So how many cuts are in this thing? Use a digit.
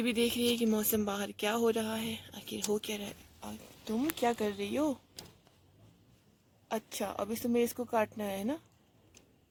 0